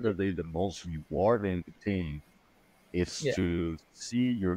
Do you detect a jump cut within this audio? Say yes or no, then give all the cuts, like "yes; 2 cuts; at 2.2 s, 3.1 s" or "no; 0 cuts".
no; 0 cuts